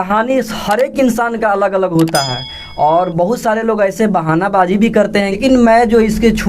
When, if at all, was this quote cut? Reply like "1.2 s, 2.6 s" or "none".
5.3 s

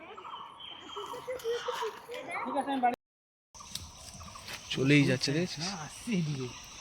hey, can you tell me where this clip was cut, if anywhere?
2.9 s

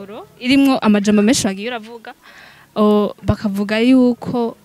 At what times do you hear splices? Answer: none

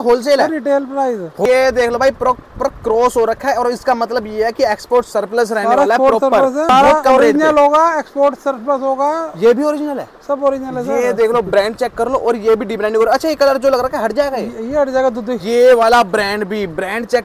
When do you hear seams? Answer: 1.4 s, 6.7 s, 15.3 s

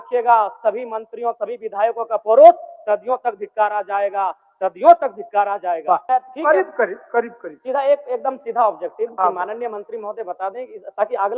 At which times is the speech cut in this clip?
6.0 s

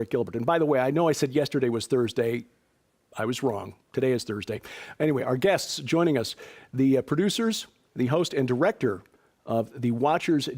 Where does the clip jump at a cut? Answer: 6.1 s

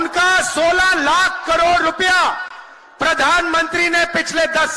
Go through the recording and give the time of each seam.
none

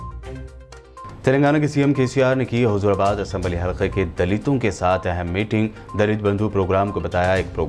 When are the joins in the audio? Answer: 1.0 s

